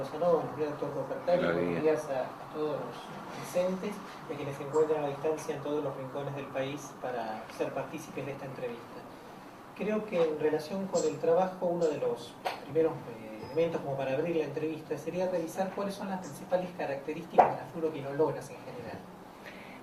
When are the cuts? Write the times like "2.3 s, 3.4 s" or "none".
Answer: none

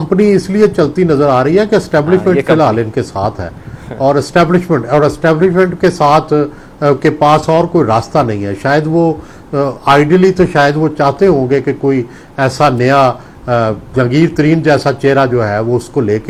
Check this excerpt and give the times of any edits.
none

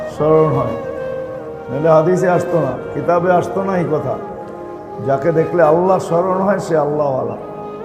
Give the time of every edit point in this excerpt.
none

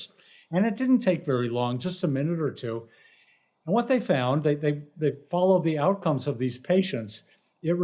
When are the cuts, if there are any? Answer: none

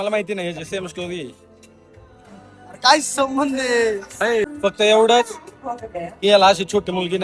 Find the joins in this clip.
4.4 s

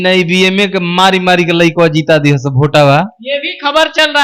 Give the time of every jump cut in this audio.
none

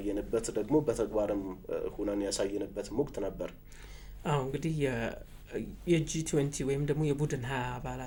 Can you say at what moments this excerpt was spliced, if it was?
none

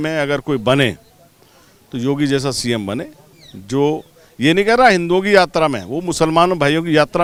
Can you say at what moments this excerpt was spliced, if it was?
none

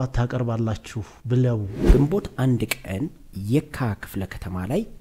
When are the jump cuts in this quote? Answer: 1.8 s

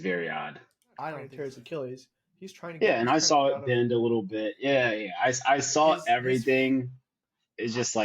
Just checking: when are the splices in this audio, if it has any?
1.3 s

